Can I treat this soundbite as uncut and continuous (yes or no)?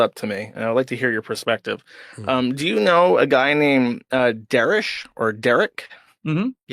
yes